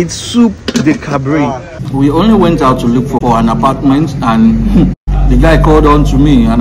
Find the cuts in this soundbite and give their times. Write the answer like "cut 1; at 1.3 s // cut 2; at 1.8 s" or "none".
cut 1; at 1.7 s // cut 2; at 3.2 s // cut 3; at 5.1 s